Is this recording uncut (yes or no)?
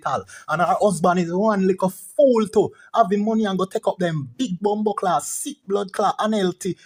yes